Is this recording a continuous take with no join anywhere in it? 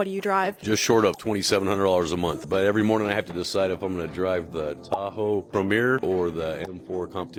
yes; 0 cuts

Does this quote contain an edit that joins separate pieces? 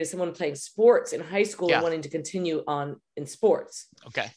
no; 0 cuts

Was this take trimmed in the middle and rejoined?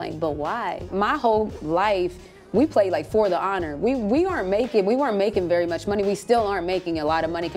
no; 0 cuts

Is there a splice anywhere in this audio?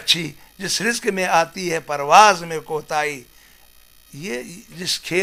no; 0 cuts

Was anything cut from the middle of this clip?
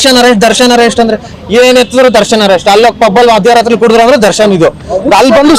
no; 0 cuts

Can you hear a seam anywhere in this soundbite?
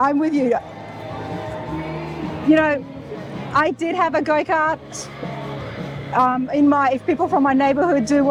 no; 0 cuts

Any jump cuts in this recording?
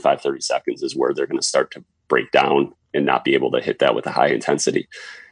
yes; 1 cut; at 2.9 s

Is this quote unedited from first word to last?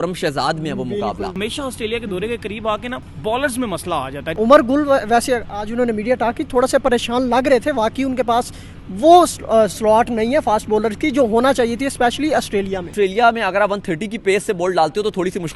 no; 4 cuts; at 1.3 s, 3.0 s, 4.2 s, 12.9 s

